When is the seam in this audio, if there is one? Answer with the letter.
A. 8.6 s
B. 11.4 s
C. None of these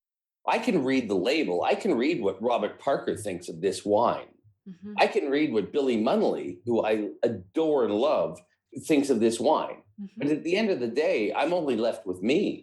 A